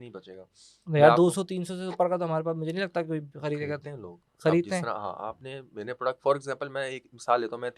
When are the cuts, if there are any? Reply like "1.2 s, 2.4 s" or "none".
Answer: none